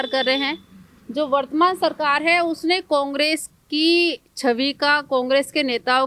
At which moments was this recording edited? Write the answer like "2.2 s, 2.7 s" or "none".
none